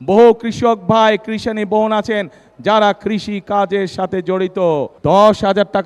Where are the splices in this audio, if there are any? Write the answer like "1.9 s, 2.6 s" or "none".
4.9 s